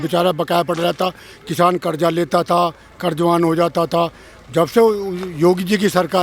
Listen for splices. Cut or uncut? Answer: uncut